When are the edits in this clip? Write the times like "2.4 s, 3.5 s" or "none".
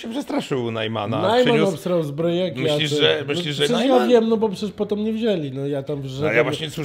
none